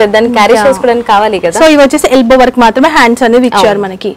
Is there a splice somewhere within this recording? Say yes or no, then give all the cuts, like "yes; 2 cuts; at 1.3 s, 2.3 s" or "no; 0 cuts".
no; 0 cuts